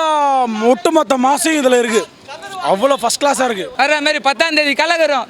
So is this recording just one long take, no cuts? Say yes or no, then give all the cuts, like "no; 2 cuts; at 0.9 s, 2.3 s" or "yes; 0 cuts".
no; 1 cut; at 3.7 s